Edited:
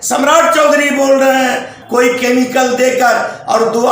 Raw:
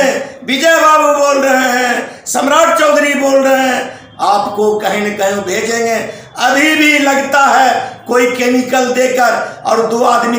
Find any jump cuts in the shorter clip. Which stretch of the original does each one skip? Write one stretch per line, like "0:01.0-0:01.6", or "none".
0:04.0-0:07.9